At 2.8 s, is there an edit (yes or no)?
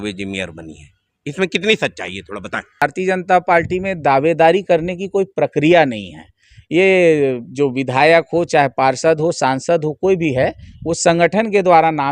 yes